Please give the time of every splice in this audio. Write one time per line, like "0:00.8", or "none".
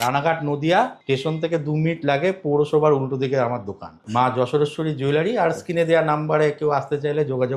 0:01.0
0:04.0